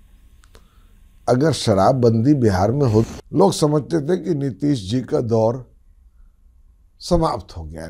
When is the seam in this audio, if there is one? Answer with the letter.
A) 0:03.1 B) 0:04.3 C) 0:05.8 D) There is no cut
A